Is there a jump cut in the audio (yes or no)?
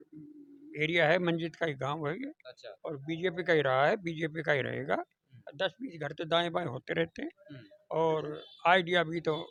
no